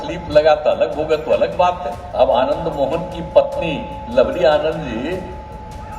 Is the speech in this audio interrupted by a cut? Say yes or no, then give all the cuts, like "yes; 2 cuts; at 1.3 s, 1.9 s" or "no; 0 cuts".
yes; 1 cut; at 2.0 s